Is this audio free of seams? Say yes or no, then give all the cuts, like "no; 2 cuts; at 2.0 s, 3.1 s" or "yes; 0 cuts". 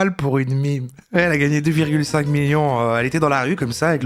yes; 0 cuts